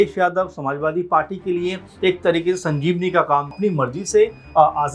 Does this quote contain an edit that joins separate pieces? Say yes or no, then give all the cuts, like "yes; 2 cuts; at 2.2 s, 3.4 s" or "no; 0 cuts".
yes; 1 cut; at 3.5 s